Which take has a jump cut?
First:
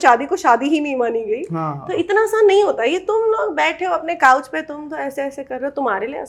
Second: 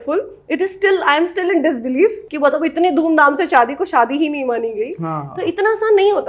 second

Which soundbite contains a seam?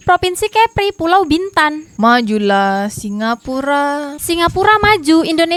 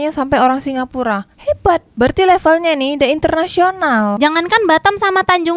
second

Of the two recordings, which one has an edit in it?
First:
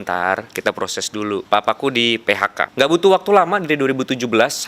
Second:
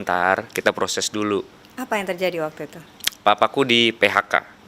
first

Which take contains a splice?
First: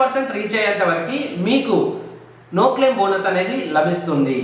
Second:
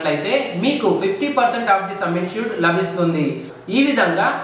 second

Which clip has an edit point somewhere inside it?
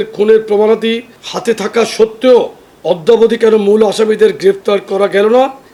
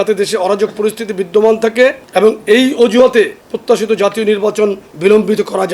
second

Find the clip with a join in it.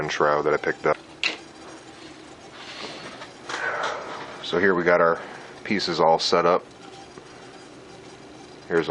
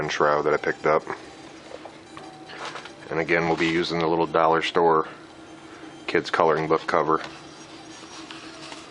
second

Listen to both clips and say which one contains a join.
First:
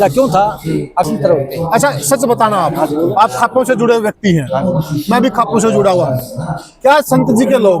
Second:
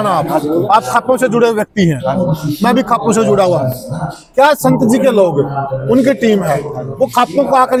first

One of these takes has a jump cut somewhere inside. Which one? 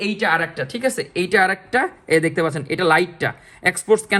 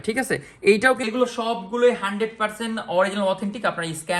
second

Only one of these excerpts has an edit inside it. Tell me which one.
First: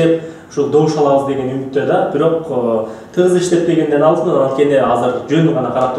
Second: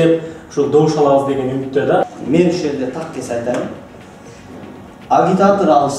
second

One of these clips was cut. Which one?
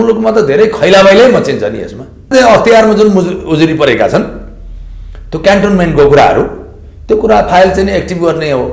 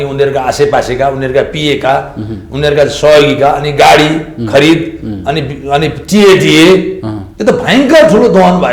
first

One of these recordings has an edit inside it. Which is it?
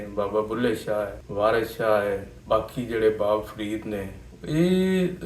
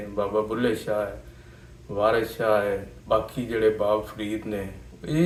first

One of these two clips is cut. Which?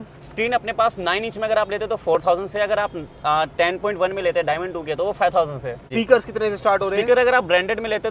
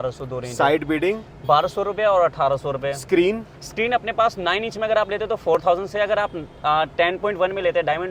first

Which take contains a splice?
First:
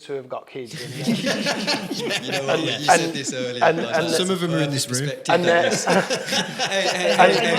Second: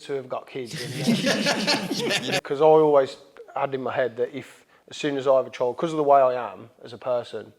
second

